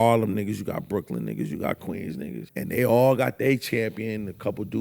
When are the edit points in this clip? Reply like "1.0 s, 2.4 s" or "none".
2.4 s